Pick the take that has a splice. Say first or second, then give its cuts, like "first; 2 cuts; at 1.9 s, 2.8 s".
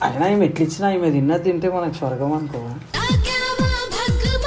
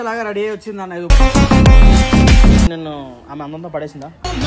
second; 1 cut; at 2.7 s